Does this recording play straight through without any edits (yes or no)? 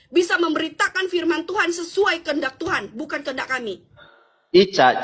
no